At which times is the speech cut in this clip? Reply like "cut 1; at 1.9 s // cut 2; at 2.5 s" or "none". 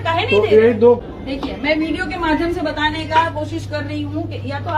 none